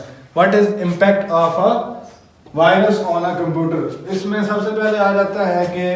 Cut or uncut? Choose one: uncut